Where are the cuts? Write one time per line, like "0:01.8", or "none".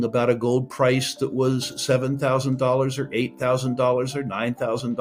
none